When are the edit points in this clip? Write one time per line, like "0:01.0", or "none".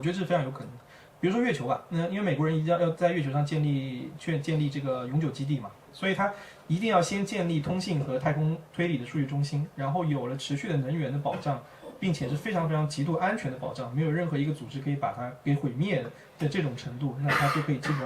0:05.9